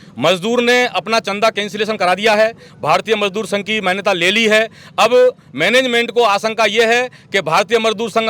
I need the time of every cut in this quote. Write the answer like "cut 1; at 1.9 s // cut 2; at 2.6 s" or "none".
none